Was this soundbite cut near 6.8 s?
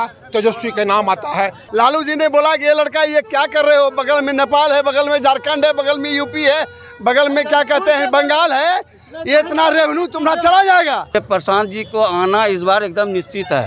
no; 2 cuts; at 1.6 s, 11.1 s

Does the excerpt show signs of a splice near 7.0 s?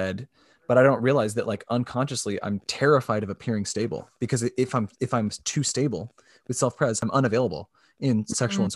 yes; 1 cut; at 7.0 s

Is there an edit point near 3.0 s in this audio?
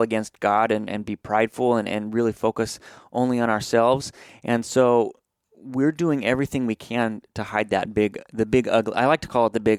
no; 0 cuts

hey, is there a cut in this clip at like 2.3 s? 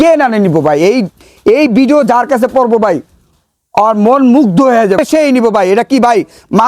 no; 1 cut; at 5.0 s

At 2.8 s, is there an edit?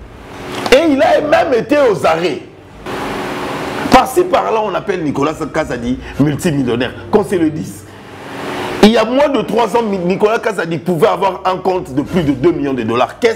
yes; 1 cut; at 2.8 s

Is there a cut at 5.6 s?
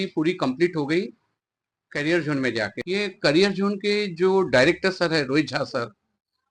no; 1 cut; at 2.7 s

